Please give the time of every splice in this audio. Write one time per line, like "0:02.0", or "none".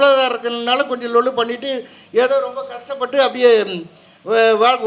none